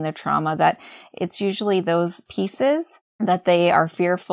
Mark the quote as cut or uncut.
cut